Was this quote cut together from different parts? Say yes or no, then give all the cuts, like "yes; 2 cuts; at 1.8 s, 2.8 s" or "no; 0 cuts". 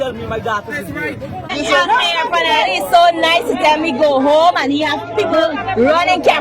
yes; 1 cut; at 1.5 s